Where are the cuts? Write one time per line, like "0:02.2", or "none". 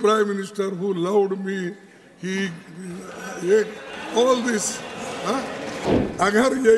0:05.9